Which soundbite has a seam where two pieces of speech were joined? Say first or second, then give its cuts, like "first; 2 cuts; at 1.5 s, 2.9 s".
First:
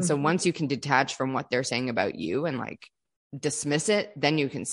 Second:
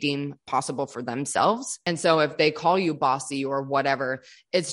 second; 1 cut; at 1.8 s